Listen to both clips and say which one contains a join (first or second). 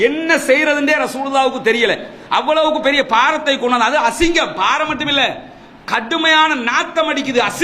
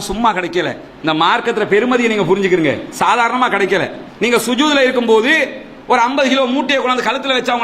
second